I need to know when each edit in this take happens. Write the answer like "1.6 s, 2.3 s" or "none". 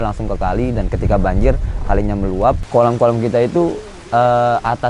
2.6 s